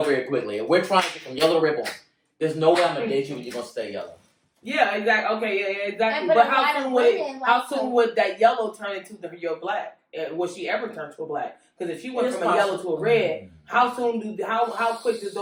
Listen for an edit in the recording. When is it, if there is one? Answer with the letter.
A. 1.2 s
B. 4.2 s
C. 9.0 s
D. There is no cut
D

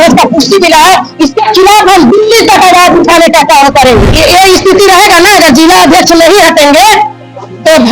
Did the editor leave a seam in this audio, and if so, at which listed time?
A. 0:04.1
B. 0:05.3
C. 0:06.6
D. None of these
A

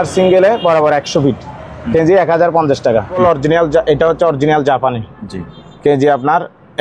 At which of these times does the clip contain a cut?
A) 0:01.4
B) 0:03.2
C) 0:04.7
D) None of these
B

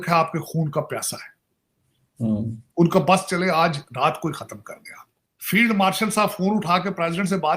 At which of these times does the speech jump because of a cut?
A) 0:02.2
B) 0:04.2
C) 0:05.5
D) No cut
C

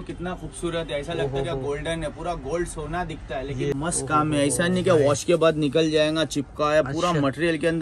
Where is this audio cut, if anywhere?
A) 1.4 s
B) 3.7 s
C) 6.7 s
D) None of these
B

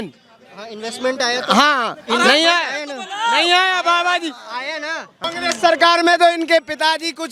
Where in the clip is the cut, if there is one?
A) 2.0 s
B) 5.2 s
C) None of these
B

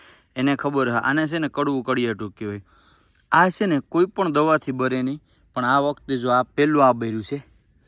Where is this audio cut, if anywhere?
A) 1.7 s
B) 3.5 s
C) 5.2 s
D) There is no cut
D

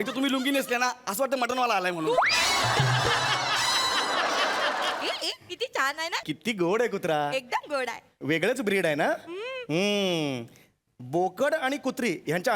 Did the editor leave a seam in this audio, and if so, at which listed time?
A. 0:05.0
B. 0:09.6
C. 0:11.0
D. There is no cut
A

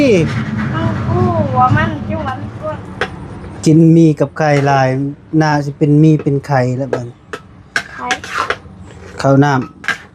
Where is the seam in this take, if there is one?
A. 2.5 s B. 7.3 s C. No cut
A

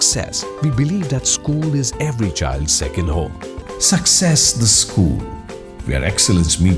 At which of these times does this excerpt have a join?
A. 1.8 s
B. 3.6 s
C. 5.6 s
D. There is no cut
B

